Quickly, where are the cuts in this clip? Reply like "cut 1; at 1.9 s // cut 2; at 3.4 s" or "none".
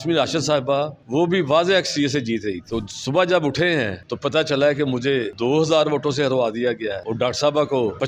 none